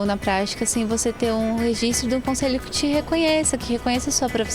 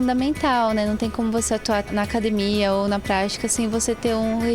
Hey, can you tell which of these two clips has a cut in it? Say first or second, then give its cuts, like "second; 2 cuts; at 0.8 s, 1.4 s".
second; 1 cut; at 1.9 s